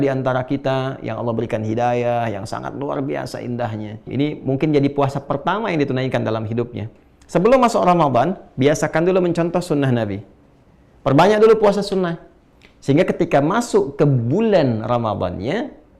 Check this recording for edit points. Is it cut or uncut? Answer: cut